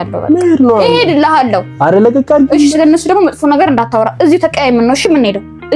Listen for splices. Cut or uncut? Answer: uncut